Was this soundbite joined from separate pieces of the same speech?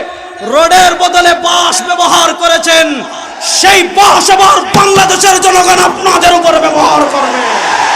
no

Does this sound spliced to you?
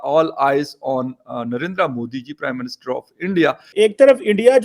yes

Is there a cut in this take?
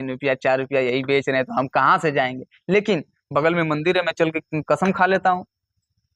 yes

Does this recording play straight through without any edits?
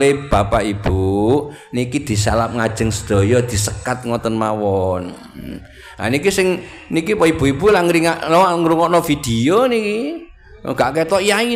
yes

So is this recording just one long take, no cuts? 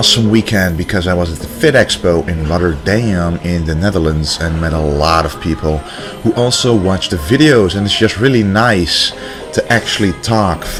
yes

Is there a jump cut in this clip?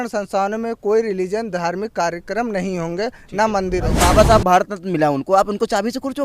yes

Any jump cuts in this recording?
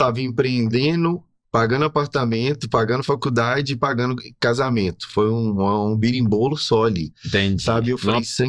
no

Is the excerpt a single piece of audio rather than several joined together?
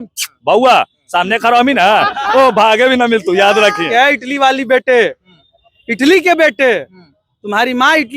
no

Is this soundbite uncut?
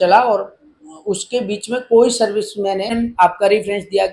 no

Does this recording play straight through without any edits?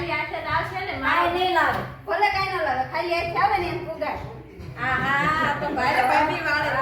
yes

